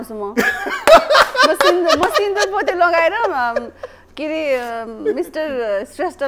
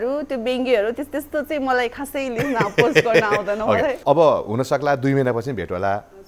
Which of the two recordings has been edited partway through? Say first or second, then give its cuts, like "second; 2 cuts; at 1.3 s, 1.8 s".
second; 1 cut; at 4.0 s